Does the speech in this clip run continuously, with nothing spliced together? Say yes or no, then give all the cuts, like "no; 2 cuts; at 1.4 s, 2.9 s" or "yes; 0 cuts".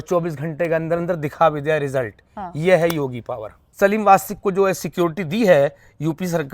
no; 1 cut; at 3.6 s